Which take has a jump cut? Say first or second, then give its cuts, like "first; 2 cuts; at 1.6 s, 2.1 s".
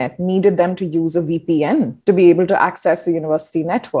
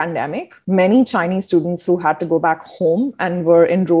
first; 1 cut; at 2.0 s